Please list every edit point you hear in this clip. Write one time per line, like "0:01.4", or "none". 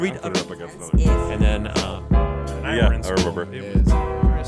none